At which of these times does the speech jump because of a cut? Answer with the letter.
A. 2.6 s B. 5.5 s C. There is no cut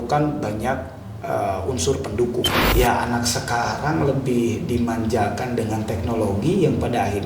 A